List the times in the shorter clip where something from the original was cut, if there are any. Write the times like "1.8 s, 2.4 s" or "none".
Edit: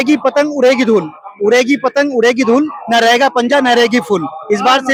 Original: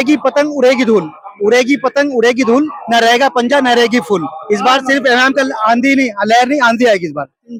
none